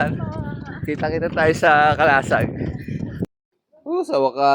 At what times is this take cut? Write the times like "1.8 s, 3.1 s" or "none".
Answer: 3.2 s